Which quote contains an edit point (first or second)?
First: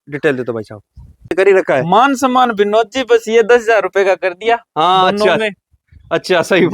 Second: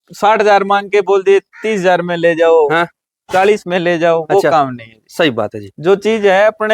first